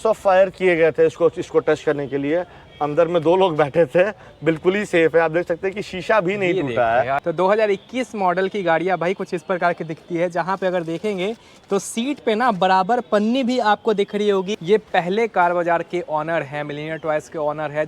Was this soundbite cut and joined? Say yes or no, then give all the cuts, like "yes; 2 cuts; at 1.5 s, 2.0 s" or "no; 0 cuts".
yes; 2 cuts; at 7.2 s, 14.5 s